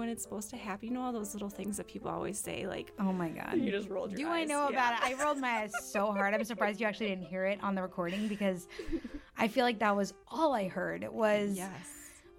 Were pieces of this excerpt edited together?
yes; 1 cut; at 2.9 s

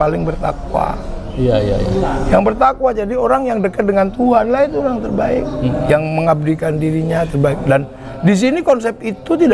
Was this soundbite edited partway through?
no; 0 cuts

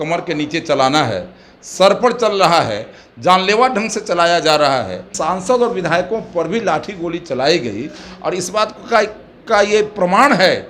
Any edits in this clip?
yes; 1 cut; at 5.1 s

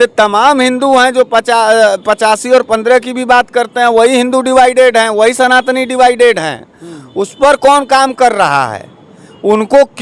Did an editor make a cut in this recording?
no; 0 cuts

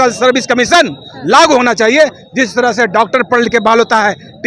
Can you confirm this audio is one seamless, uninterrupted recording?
yes; 0 cuts

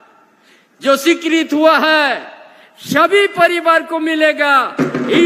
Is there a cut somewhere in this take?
no; 0 cuts

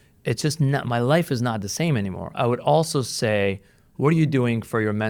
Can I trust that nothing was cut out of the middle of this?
yes; 0 cuts

